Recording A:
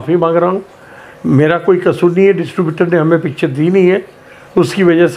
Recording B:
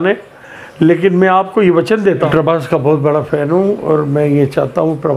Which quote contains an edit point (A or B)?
B